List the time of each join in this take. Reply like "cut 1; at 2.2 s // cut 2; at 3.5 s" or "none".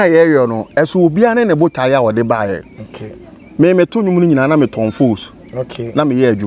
none